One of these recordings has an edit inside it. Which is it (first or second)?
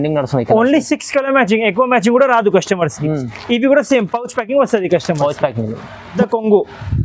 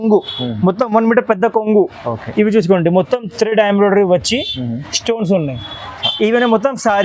first